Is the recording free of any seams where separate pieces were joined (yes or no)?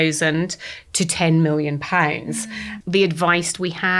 no